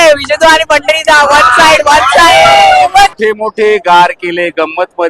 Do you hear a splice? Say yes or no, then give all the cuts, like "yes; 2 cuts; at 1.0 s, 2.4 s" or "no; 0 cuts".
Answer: yes; 1 cut; at 3.1 s